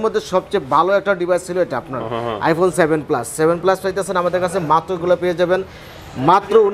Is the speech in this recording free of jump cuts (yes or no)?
yes